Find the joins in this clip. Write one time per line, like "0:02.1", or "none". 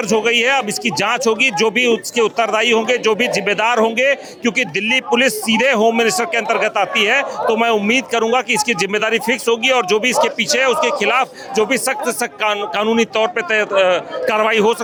none